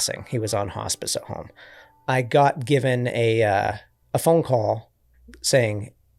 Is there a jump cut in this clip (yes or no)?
no